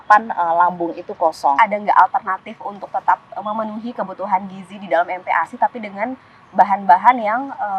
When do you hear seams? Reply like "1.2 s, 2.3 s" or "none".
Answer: 1.6 s